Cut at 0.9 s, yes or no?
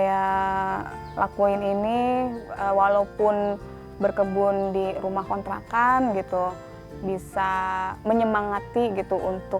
yes